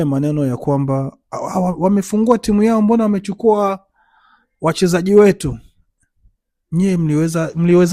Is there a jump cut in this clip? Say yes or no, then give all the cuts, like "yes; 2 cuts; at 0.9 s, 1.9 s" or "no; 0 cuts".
no; 0 cuts